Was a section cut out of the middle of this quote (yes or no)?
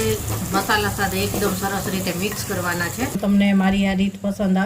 yes